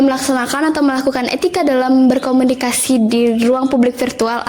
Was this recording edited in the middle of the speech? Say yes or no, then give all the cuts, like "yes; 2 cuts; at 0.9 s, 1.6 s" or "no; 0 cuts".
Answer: no; 0 cuts